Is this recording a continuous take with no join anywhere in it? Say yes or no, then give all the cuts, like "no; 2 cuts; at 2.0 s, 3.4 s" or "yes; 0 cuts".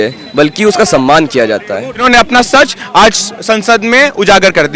no; 1 cut; at 2.0 s